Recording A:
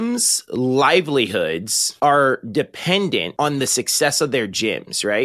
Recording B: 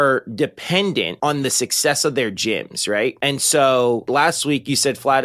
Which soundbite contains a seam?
B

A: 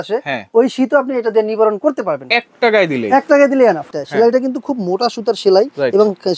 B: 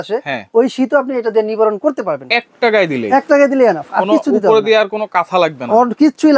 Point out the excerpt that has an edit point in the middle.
A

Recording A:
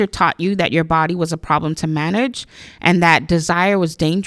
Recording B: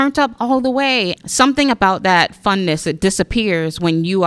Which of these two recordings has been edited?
B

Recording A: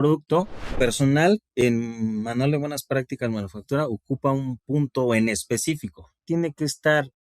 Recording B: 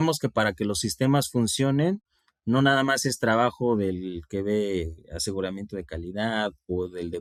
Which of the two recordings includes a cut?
A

